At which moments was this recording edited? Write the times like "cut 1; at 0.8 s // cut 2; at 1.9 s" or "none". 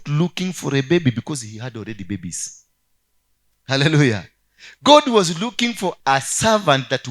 cut 1; at 6.0 s